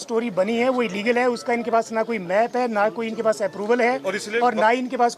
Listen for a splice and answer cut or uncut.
uncut